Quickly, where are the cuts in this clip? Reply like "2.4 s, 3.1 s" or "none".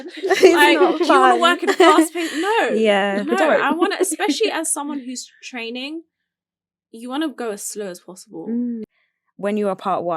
8.8 s